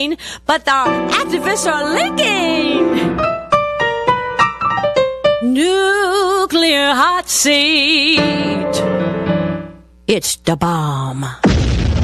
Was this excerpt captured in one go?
yes; 0 cuts

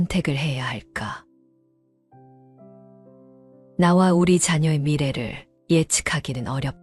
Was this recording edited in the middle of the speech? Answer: no; 0 cuts

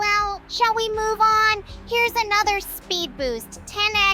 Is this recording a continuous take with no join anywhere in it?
yes; 0 cuts

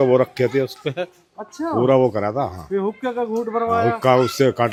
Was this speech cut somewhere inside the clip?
no; 0 cuts

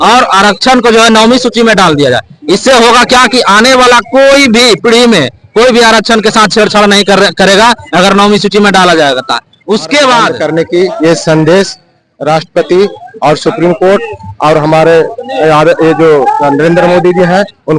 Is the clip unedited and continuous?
no; 1 cut; at 10.3 s

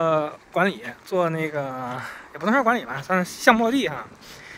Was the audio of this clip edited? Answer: no; 0 cuts

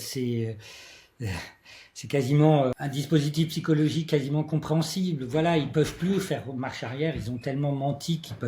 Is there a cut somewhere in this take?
yes; 1 cut; at 2.8 s

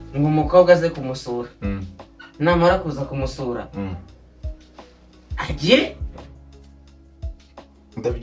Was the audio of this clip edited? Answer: no; 0 cuts

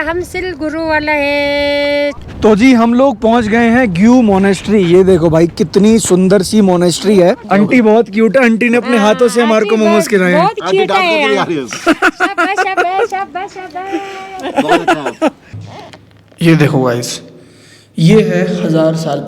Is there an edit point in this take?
yes; 3 cuts; at 2.2 s, 7.4 s, 15.5 s

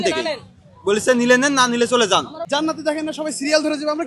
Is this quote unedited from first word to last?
no; 1 cut; at 2.4 s

